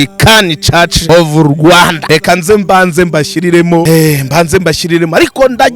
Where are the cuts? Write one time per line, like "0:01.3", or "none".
0:01.0
0:02.0
0:03.9